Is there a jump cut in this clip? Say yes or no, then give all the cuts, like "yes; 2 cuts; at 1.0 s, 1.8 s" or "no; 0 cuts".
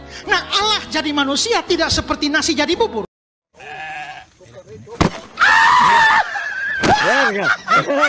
yes; 1 cut; at 3.1 s